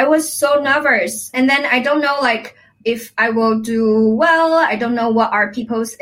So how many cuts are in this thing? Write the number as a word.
two